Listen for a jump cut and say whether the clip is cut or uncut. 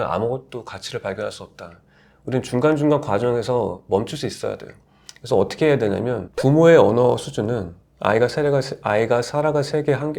cut